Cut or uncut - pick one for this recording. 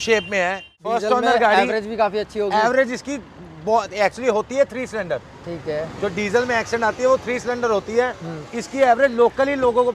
cut